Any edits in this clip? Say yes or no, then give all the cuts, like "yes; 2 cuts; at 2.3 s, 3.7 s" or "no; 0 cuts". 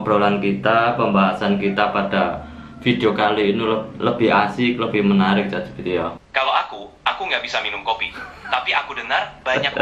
yes; 1 cut; at 6.2 s